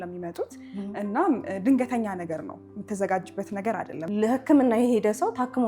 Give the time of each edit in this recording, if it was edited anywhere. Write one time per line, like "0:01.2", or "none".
0:04.1